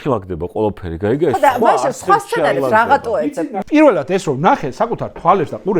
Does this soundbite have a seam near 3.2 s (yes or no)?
yes